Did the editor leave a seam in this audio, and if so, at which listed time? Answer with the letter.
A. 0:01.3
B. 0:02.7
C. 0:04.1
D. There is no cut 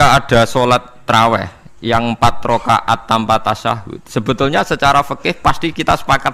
D